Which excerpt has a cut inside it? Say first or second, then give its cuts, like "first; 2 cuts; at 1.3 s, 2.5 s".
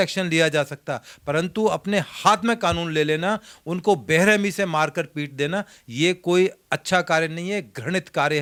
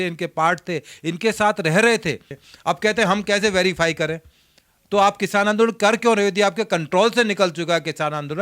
second; 1 cut; at 2.3 s